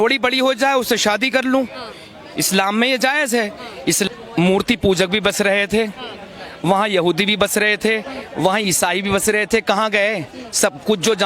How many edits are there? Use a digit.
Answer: 1